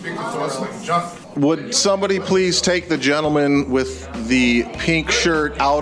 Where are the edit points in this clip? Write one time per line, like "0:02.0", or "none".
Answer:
0:01.2